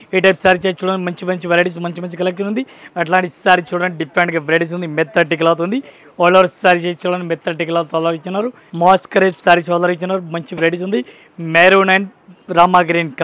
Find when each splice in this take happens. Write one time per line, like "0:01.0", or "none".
0:02.8
0:08.6